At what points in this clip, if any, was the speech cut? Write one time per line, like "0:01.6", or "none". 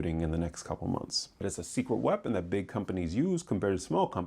0:01.5